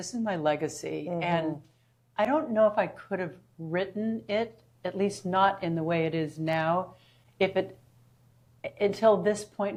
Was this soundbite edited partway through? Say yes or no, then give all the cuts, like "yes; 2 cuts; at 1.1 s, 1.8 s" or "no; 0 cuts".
no; 0 cuts